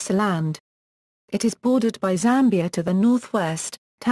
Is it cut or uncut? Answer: uncut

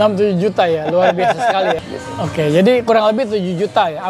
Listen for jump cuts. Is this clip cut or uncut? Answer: cut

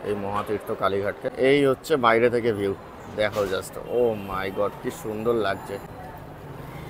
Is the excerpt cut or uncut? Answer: cut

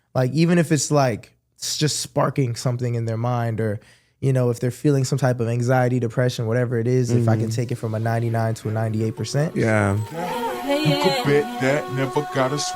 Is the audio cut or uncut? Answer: cut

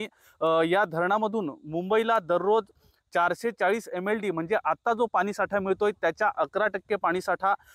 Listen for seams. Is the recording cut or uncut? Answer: cut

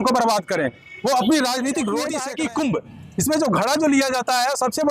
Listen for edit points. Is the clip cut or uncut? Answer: cut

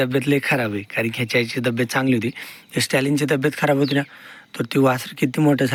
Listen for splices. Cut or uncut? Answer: uncut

